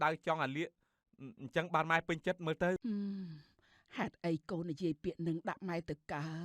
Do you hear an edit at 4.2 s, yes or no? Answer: no